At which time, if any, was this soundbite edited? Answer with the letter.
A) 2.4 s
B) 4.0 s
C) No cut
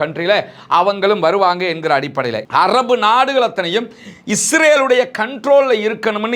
A